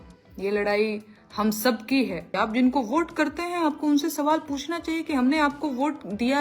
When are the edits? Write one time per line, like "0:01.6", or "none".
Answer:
0:02.3